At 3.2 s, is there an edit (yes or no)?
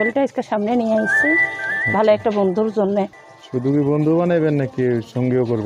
yes